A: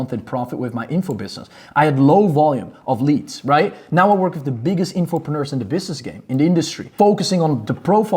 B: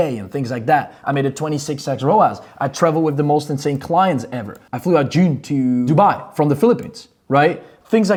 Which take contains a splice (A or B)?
A